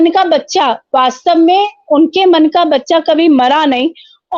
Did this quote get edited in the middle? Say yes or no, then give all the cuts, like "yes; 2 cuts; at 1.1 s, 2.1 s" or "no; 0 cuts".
no; 0 cuts